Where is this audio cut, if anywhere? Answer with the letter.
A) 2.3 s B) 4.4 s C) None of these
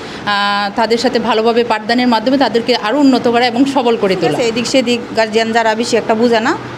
B